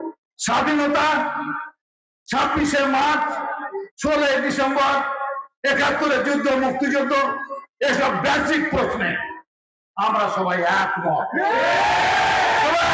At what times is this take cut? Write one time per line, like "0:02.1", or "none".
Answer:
none